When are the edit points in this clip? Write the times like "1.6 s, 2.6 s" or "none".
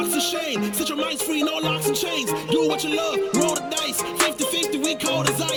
none